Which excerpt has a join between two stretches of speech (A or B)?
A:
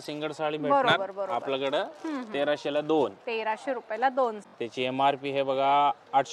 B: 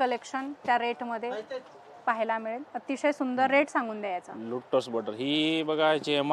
A